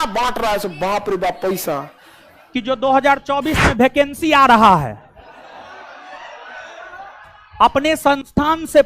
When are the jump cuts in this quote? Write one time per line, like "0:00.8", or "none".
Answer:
0:02.5